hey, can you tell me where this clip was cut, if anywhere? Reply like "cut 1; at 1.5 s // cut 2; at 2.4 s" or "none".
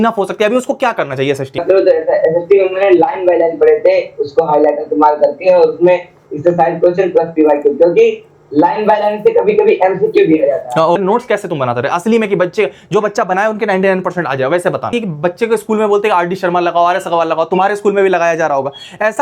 cut 1; at 1.6 s // cut 2; at 11.0 s // cut 3; at 14.9 s